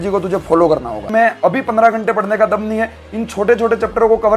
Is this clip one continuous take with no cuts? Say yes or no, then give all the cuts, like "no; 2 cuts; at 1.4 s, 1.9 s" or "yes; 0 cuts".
no; 1 cut; at 0.9 s